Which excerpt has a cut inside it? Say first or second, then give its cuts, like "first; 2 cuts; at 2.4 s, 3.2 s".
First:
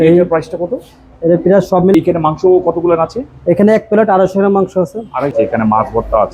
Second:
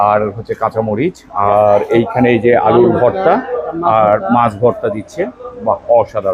first; 2 cuts; at 1.9 s, 5.3 s